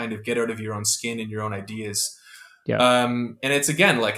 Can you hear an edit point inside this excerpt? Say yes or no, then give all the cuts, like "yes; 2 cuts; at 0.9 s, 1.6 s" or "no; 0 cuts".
no; 0 cuts